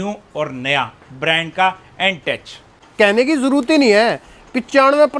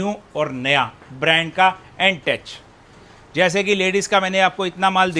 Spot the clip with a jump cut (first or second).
first